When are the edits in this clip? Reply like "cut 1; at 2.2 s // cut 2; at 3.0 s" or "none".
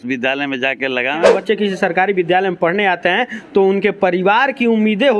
cut 1; at 1.2 s